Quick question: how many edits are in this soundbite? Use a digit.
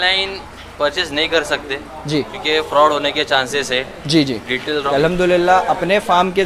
1